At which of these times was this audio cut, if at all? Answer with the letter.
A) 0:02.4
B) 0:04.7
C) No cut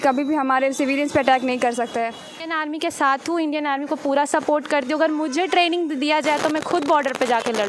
A